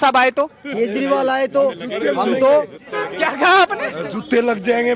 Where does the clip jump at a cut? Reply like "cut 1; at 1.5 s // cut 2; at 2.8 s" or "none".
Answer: none